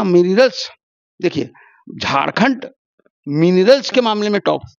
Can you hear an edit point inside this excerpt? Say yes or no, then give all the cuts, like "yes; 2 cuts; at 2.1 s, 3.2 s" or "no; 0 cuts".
no; 0 cuts